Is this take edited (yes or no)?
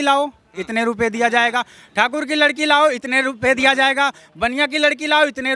no